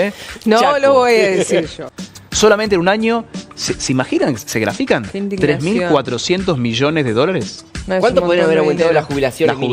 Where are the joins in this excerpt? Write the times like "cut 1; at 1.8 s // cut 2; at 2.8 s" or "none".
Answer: cut 1; at 1.8 s